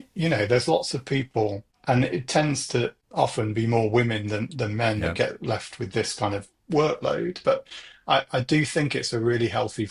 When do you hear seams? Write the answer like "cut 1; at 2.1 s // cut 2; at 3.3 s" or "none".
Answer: cut 1; at 1.7 s // cut 2; at 3.0 s